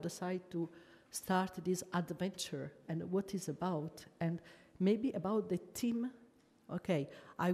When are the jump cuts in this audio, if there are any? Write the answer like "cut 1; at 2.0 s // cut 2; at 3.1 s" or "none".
none